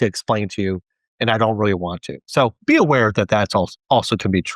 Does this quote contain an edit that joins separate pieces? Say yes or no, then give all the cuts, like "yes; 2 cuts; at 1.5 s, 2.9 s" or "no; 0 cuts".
no; 0 cuts